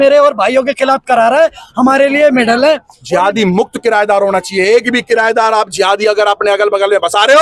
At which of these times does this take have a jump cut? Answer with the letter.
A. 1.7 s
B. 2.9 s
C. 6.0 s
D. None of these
B